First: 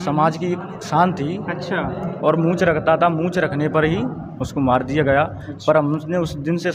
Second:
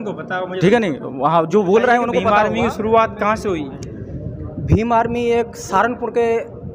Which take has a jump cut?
second; 1 cut; at 2.3 s

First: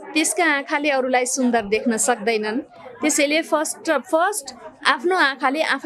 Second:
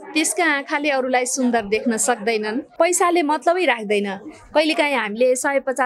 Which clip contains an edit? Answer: second; 1 cut; at 2.7 s

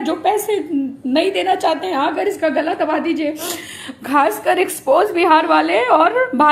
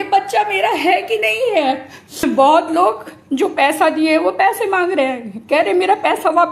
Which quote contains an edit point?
second; 1 cut; at 2.2 s

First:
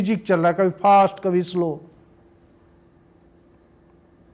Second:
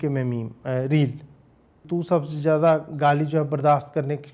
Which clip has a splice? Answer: second; 1 cut; at 1.8 s

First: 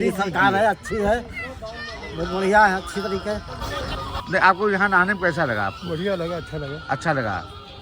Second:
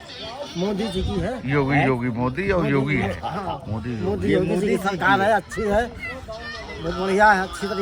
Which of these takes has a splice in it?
first; 1 cut; at 4.1 s

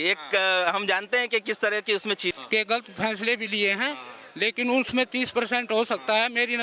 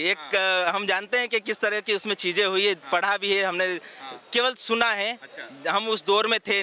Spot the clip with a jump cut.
first; 1 cut; at 2.3 s

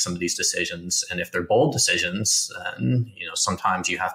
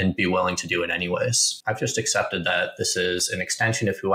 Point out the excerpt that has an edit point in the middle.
second; 1 cut; at 1.5 s

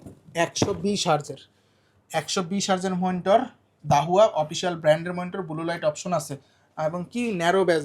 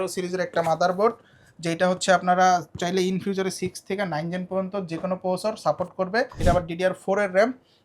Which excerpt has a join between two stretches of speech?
second; 1 cut; at 6.3 s

